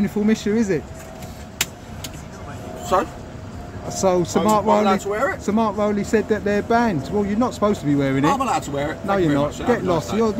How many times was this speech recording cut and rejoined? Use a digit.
1